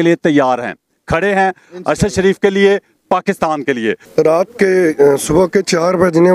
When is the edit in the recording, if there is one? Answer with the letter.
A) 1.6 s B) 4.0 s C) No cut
C